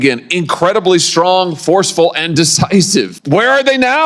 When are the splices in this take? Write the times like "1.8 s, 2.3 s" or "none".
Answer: 3.2 s